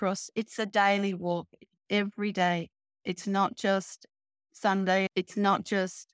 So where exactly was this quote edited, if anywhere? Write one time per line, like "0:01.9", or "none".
0:05.1